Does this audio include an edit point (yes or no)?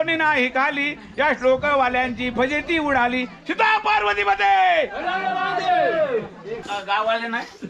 yes